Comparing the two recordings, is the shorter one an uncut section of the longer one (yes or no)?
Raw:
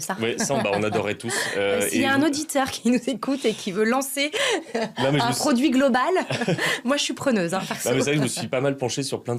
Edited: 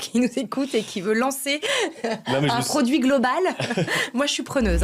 yes